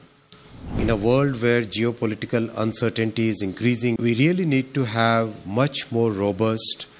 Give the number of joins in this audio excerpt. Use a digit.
2